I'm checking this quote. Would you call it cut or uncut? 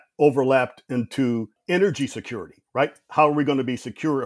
uncut